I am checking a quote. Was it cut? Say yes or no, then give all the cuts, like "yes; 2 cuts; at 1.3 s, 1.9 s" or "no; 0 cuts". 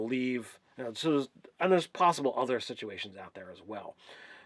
no; 0 cuts